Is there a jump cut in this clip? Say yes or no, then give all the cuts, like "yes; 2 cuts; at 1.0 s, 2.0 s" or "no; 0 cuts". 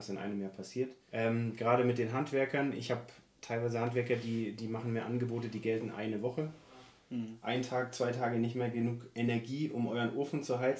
yes; 2 cuts; at 1.0 s, 7.0 s